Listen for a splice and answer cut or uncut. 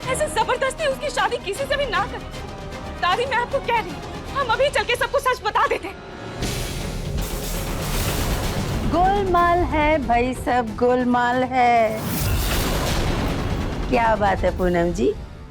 cut